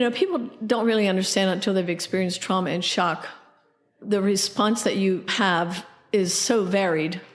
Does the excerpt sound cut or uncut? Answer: uncut